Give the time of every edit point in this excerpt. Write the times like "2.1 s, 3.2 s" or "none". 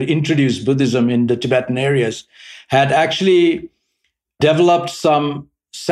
none

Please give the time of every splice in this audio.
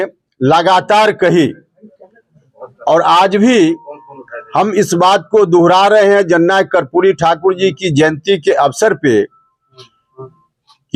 none

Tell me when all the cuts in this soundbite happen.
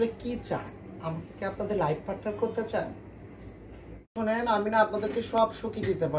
4.1 s

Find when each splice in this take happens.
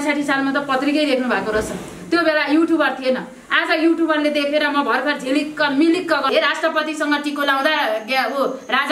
6.3 s

